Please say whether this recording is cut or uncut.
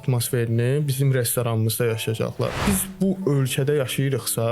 cut